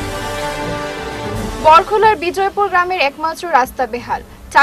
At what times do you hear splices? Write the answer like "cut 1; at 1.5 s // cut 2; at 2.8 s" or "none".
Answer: cut 1; at 0.9 s